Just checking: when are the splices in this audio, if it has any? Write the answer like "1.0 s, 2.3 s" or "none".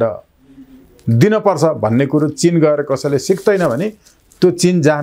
none